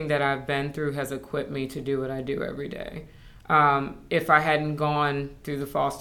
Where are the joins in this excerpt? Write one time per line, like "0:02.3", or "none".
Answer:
none